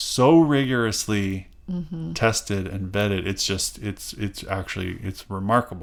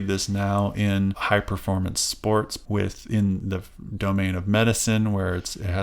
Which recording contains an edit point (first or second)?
second